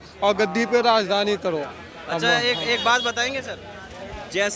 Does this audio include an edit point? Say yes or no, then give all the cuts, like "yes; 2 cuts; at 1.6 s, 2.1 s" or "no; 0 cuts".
no; 0 cuts